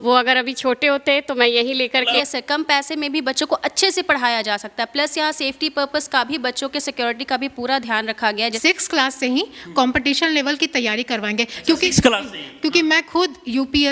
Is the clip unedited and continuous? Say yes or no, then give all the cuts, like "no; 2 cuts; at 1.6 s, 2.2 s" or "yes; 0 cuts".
no; 2 cuts; at 2.2 s, 8.4 s